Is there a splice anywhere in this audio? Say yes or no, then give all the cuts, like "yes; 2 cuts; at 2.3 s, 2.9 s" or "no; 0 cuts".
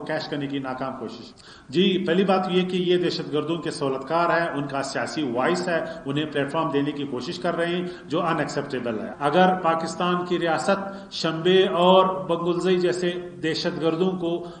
yes; 1 cut; at 9.1 s